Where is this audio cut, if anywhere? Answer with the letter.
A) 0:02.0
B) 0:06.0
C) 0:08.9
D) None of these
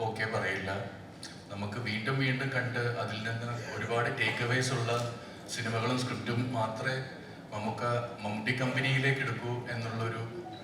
D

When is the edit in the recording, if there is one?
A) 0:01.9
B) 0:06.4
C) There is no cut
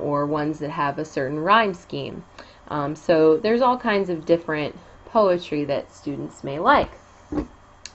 B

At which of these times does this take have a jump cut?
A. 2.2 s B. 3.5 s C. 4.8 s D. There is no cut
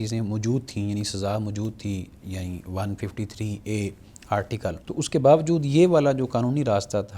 C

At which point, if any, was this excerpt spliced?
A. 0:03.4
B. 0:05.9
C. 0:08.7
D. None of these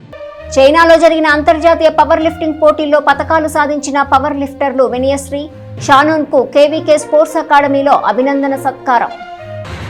D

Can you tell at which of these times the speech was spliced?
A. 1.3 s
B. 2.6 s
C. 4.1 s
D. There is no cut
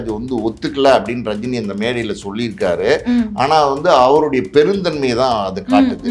D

